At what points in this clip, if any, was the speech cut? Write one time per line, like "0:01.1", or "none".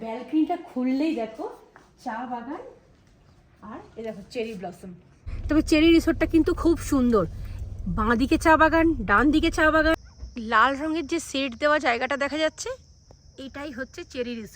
0:05.3
0:09.9